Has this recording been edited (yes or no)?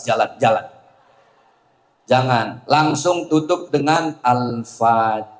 no